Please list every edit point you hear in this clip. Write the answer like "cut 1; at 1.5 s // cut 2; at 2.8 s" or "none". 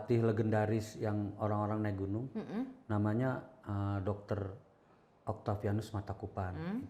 none